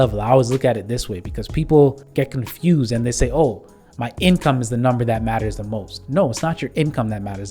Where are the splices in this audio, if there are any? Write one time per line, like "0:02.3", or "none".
0:02.0